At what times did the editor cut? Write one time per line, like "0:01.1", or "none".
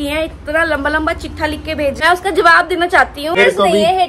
0:02.0
0:03.3